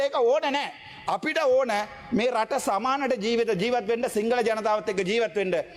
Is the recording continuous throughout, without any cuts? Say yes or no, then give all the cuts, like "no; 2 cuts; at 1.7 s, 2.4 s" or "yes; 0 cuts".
yes; 0 cuts